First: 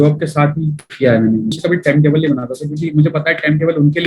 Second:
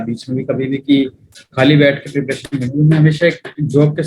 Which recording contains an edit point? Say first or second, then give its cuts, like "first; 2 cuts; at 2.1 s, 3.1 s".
first; 1 cut; at 1.6 s